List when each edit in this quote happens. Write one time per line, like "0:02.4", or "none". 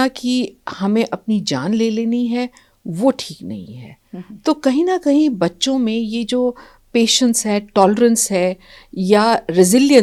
none